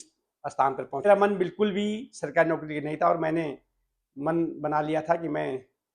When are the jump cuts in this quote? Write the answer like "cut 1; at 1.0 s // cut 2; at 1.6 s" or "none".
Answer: cut 1; at 1.1 s